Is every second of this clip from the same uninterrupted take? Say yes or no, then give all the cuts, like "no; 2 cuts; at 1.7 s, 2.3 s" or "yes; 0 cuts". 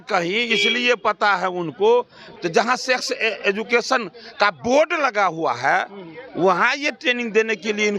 no; 1 cut; at 2.2 s